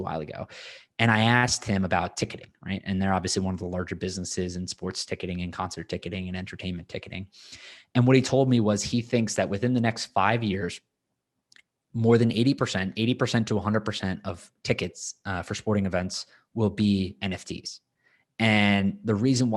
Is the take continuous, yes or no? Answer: yes